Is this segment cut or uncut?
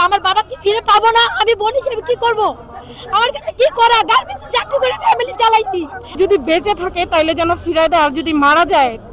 uncut